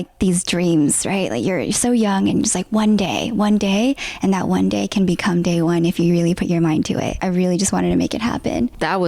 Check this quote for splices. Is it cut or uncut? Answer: uncut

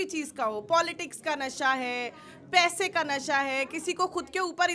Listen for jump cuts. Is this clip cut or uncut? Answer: uncut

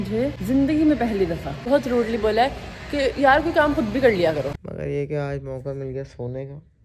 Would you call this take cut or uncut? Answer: cut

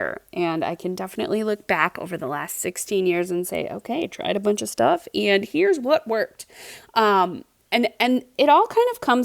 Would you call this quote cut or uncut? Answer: uncut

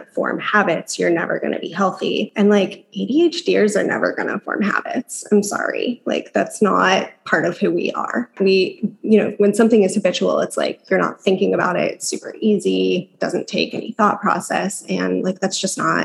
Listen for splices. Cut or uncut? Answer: cut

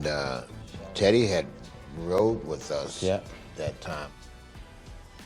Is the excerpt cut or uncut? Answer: uncut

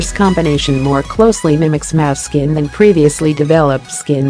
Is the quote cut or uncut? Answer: uncut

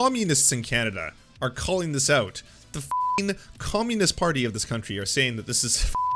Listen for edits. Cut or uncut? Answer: uncut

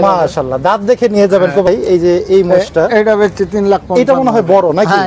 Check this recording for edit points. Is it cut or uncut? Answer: cut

